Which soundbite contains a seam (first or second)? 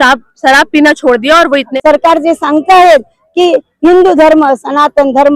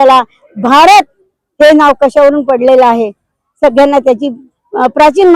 first